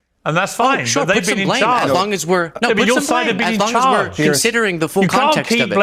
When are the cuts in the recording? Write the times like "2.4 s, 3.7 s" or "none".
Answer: none